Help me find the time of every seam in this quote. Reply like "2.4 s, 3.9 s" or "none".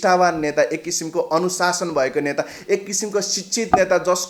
none